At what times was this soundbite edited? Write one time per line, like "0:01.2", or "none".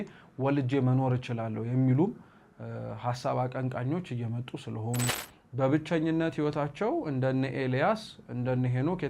0:05.2